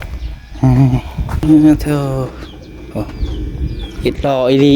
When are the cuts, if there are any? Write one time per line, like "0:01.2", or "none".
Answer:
0:01.4

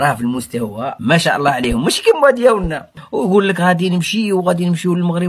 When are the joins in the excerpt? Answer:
0:00.9

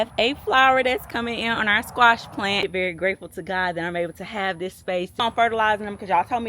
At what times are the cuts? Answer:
0:02.7
0:05.2

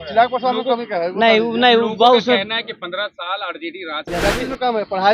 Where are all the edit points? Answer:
0:04.0

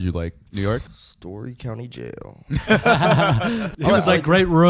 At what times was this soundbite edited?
0:01.0
0:03.7

